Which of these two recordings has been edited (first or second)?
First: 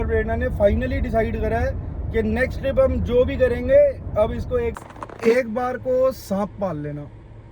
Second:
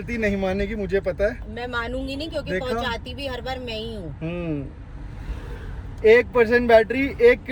first